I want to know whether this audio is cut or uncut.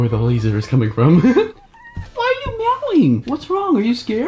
cut